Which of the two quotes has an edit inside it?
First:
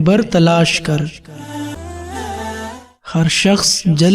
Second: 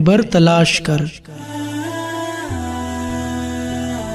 first; 1 cut; at 1.7 s

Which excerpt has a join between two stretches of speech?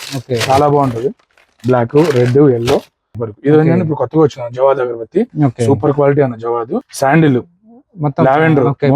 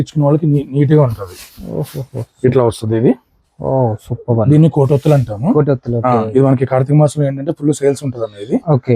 first; 2 cuts; at 3.2 s, 6.8 s

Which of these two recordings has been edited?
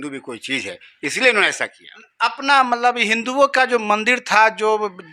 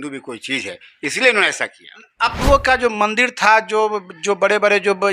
second; 1 cut; at 2.4 s

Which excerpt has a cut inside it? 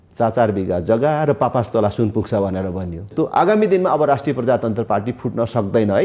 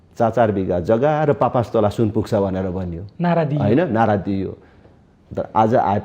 first; 1 cut; at 3.1 s

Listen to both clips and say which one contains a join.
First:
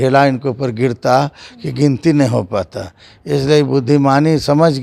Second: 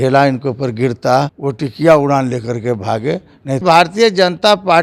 second; 2 cuts; at 1.4 s, 3.6 s

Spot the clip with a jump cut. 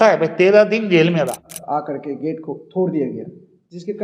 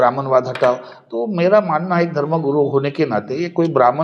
first; 1 cut; at 1.5 s

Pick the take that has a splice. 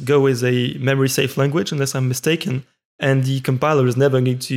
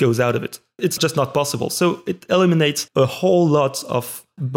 second; 2 cuts; at 0.9 s, 2.8 s

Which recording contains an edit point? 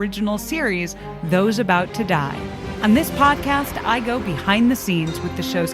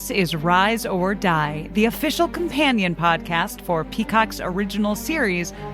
first; 1 cut; at 2.6 s

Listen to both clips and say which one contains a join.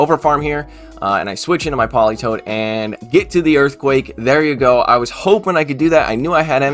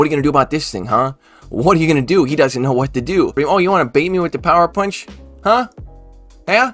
second; 1 cut; at 3.3 s

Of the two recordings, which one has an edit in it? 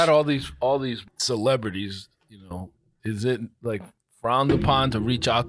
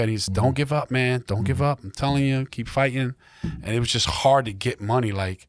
first; 2 cuts; at 1.1 s, 3.0 s

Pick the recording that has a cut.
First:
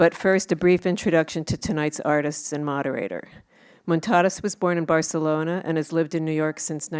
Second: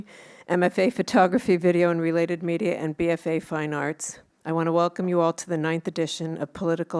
first; 1 cut; at 4.8 s

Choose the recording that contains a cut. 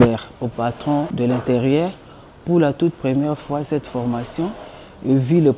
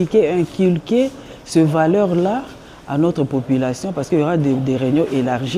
first; 1 cut; at 1.1 s

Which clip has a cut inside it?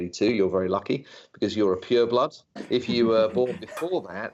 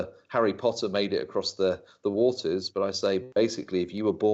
first; 1 cut; at 2.5 s

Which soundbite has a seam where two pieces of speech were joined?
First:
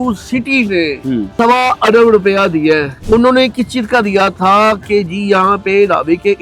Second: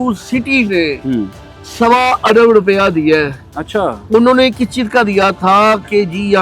first; 2 cuts; at 1.3 s, 3.0 s

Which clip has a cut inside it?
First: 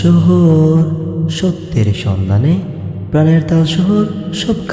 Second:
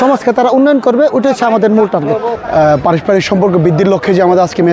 second; 1 cut; at 2.3 s

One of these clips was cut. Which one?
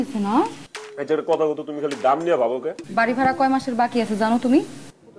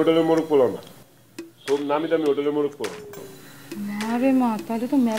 first; 1 cut; at 2.8 s

